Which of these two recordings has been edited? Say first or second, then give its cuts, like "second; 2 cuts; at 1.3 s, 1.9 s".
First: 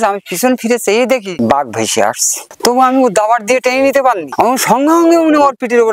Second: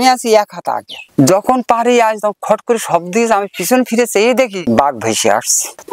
second; 1 cut; at 1.1 s